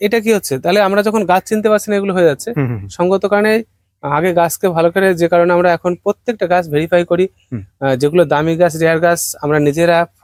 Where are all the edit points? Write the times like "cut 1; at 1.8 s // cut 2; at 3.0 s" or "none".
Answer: none